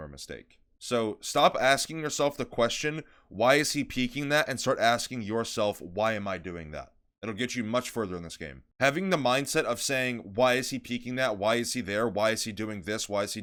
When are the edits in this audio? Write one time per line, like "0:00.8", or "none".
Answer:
none